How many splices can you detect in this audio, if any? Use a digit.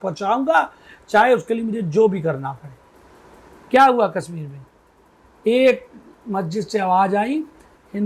0